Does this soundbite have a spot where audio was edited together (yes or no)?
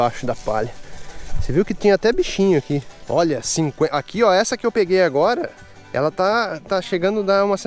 yes